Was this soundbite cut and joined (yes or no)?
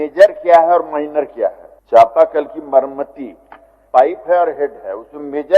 yes